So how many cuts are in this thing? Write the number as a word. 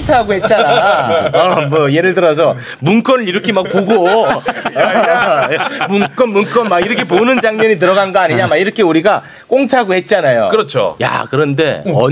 zero